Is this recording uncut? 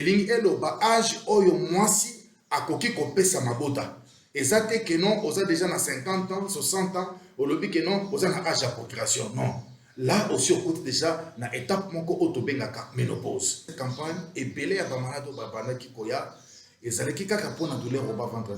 no; 1 cut; at 13.8 s

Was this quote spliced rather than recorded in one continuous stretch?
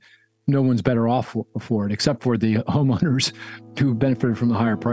yes; 1 cut; at 4.0 s

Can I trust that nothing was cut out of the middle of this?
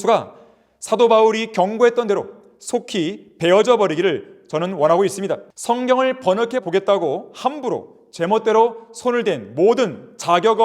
no; 1 cut; at 5.5 s

